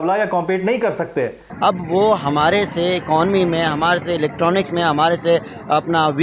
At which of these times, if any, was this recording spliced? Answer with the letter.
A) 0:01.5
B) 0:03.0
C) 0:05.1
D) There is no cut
A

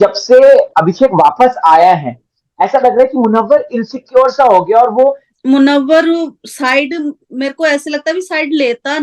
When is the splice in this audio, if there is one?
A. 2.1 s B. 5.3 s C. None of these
B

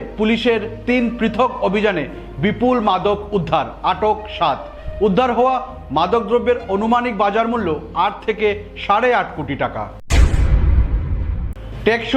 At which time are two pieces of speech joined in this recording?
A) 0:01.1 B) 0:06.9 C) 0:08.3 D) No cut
D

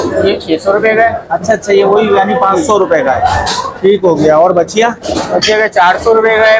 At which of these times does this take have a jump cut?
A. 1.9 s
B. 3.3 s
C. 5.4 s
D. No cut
D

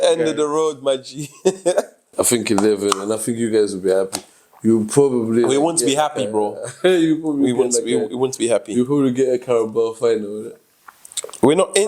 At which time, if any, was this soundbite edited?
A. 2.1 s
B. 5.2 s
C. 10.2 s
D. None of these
A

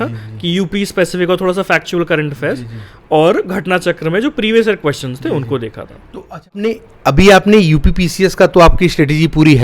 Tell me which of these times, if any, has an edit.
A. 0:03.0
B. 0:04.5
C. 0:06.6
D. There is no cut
C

